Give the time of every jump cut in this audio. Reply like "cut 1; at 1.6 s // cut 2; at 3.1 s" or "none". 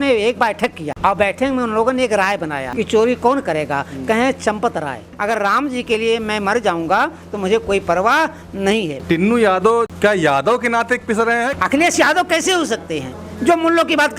cut 1; at 0.9 s // cut 2; at 2.6 s // cut 3; at 5.1 s // cut 4; at 9.0 s // cut 5; at 9.9 s // cut 6; at 11.5 s